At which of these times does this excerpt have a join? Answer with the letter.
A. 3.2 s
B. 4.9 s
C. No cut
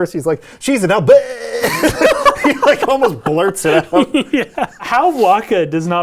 B